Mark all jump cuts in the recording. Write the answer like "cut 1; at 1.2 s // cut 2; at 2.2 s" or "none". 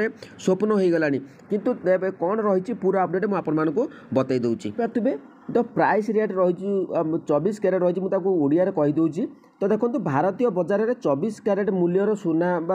cut 1; at 4.8 s